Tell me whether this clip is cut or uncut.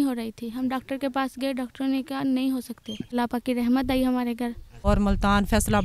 cut